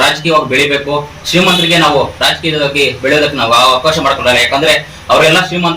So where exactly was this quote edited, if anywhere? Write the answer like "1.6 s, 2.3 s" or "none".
none